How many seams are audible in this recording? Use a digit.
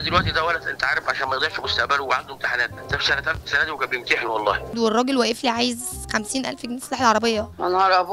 1